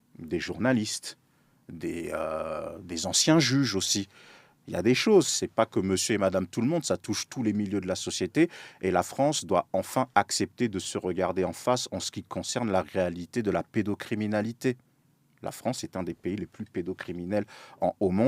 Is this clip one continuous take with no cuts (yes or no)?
yes